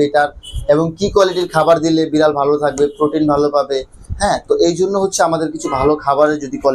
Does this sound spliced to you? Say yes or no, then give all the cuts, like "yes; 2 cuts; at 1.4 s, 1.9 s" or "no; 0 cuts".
no; 0 cuts